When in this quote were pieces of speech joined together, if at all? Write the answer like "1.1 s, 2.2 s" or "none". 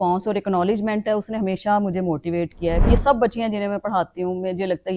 2.9 s